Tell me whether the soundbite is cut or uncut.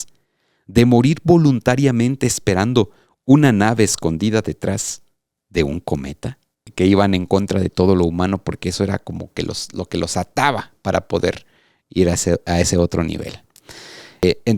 cut